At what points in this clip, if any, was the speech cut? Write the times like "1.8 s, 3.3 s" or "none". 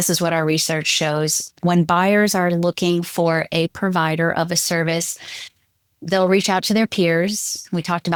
none